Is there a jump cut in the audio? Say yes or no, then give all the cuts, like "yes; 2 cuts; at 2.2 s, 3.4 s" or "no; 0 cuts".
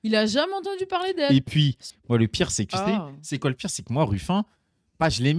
yes; 1 cut; at 1.9 s